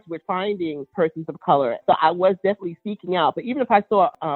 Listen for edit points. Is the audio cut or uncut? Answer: cut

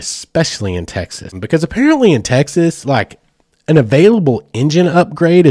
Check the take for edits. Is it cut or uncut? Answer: cut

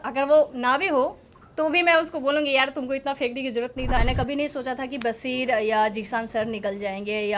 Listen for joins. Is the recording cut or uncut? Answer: cut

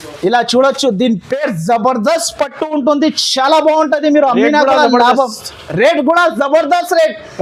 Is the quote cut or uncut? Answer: uncut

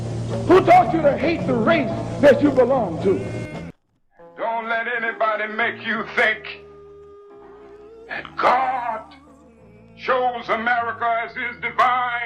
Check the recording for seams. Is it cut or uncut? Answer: cut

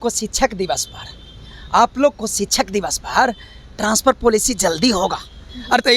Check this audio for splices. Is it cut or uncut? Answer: uncut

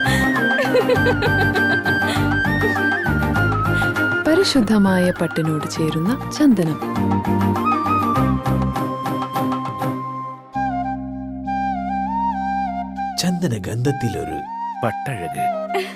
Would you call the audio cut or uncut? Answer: uncut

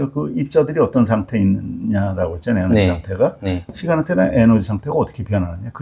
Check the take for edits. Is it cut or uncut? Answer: uncut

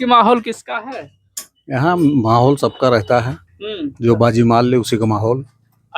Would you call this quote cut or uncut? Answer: uncut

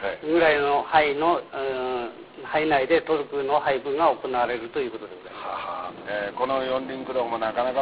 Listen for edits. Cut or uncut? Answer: cut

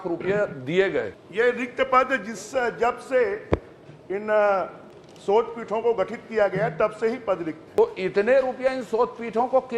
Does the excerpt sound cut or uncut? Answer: cut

